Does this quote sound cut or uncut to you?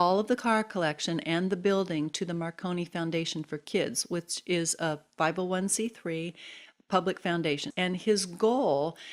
uncut